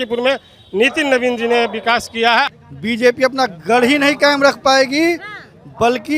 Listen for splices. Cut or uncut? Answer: cut